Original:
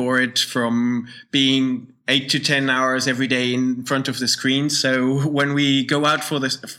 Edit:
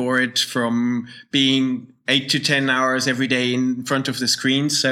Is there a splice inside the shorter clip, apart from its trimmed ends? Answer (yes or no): no